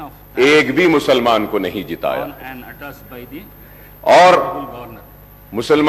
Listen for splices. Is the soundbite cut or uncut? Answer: uncut